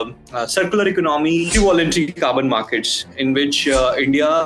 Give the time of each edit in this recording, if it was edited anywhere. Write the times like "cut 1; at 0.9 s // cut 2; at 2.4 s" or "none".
cut 1; at 1.5 s